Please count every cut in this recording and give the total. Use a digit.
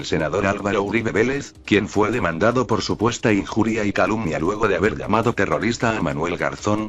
0